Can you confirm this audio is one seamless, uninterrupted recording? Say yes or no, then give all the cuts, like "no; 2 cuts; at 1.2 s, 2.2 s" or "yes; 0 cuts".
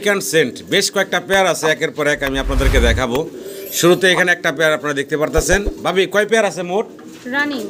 yes; 0 cuts